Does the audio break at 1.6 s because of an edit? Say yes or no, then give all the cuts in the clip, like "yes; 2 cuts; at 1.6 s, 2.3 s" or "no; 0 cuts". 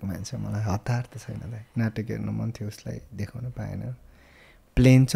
yes; 1 cut; at 1.6 s